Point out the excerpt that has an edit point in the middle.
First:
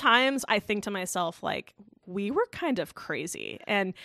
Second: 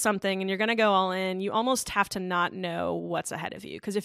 first; 1 cut; at 2.0 s

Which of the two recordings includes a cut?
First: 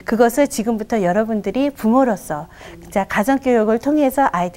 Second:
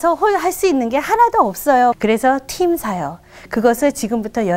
second; 1 cut; at 2.0 s

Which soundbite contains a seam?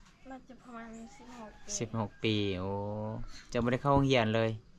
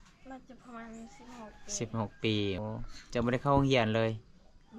second; 1 cut; at 2.6 s

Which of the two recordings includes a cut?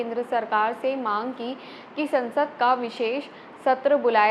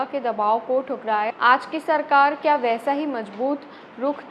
second; 1 cut; at 1.3 s

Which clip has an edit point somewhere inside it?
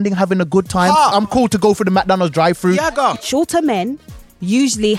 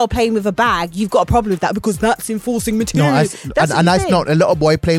first; 2 cuts; at 1.2 s, 3.1 s

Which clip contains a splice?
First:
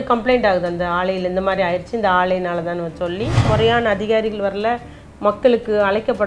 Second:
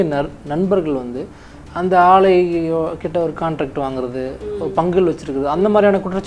first; 1 cut; at 3.5 s

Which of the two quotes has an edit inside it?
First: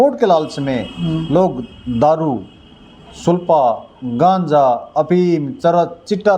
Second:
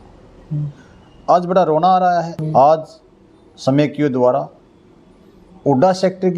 second; 1 cut; at 2.4 s

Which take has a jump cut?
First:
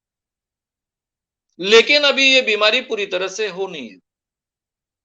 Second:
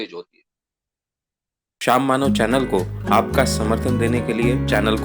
second; 1 cut; at 1.7 s

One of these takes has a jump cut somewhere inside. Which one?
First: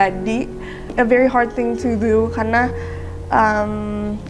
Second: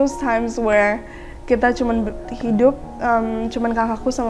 first; 1 cut; at 0.9 s

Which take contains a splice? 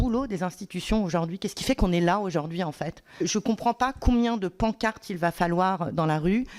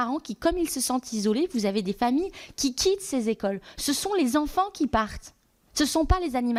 first; 1 cut; at 3.2 s

